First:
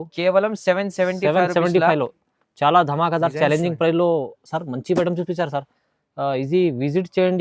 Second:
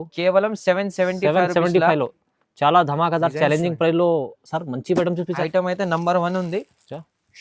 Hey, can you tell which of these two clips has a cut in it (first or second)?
second